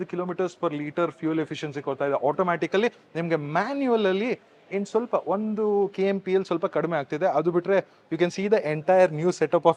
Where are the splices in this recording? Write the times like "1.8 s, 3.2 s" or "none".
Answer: none